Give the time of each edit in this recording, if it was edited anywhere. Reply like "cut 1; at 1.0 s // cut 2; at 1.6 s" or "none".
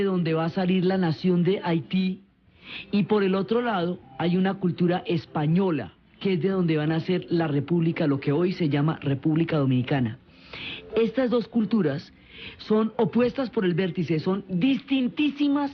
cut 1; at 13.1 s